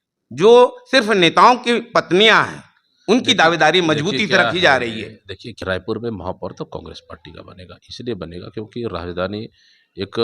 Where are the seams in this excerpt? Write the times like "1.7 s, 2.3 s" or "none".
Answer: 5.5 s